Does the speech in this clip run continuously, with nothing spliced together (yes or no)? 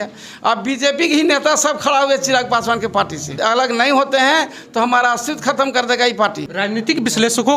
no